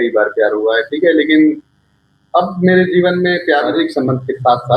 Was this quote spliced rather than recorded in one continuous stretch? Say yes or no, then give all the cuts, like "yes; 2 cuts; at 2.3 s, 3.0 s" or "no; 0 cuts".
yes; 1 cut; at 3.7 s